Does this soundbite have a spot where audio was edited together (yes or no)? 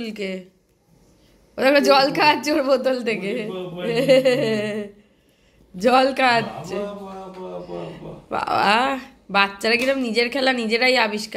no